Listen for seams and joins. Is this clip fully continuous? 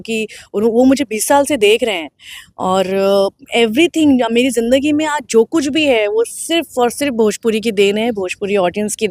yes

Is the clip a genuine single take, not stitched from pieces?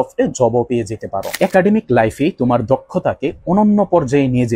no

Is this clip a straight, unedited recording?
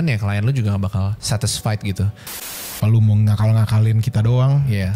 no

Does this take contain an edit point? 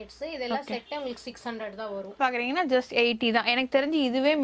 yes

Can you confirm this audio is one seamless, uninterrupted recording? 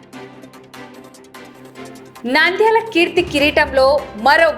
no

